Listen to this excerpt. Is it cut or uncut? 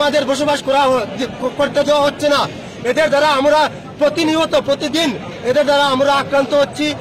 uncut